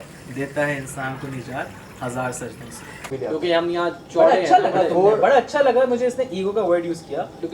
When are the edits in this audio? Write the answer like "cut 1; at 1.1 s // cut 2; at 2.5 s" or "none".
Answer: cut 1; at 3.0 s